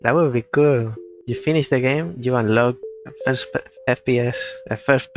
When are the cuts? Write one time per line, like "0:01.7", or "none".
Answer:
none